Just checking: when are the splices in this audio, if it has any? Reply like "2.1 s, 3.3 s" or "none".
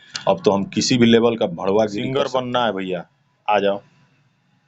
2.1 s